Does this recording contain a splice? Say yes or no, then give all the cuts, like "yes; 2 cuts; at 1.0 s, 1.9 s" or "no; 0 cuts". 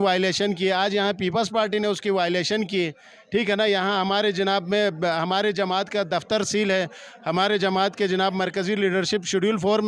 no; 0 cuts